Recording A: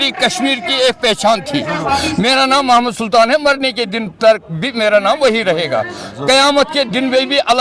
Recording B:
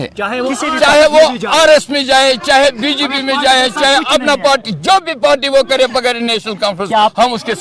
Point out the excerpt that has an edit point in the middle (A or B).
A